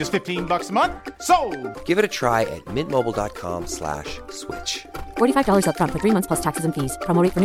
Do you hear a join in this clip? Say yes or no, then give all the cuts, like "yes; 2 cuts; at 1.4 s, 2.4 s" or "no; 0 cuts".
no; 0 cuts